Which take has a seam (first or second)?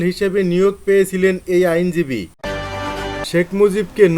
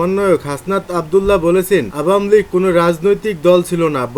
first